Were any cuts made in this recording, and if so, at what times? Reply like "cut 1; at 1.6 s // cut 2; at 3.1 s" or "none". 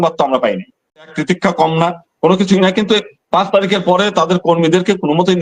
cut 1; at 1.1 s